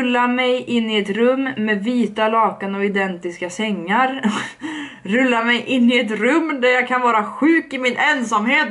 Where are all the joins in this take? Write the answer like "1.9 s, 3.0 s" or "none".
none